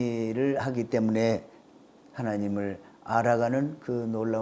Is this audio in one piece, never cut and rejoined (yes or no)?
no